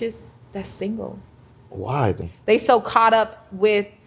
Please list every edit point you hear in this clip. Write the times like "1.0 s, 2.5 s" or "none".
2.3 s